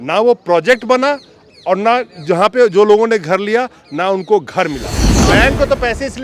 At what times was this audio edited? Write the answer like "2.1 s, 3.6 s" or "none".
5.2 s